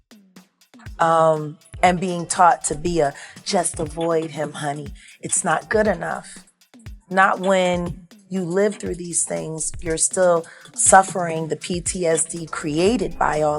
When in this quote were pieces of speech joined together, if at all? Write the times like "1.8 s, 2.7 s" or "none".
1.0 s